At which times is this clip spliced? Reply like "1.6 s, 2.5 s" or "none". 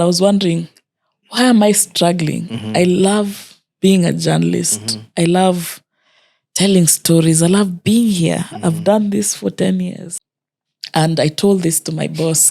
10.1 s